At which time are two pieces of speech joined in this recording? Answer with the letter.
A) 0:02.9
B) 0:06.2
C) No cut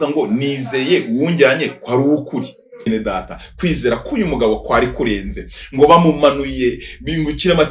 A